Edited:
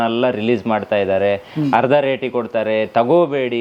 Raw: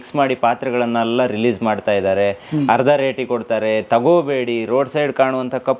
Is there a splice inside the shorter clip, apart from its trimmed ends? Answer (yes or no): no